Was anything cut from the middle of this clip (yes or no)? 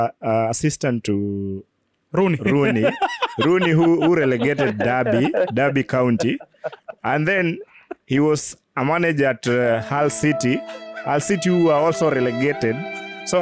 no